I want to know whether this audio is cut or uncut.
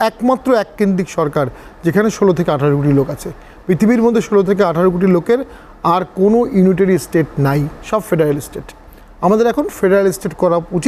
uncut